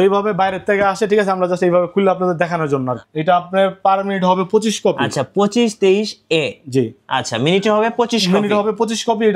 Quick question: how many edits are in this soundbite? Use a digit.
1